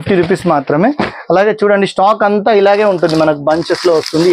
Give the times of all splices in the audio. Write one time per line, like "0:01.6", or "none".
none